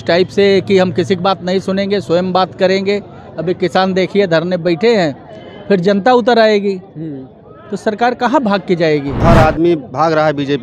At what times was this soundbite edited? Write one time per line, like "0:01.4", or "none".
0:09.2